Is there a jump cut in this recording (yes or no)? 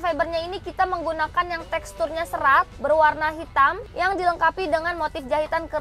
no